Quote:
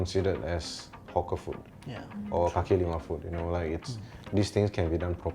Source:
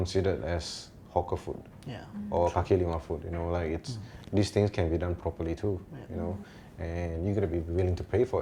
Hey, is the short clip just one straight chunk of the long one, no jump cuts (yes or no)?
yes